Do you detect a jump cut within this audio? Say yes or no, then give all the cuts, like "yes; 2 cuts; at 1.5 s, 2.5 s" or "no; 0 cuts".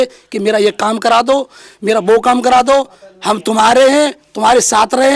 no; 0 cuts